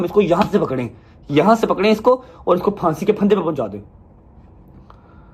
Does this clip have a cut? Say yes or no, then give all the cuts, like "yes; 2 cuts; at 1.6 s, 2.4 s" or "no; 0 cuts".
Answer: no; 0 cuts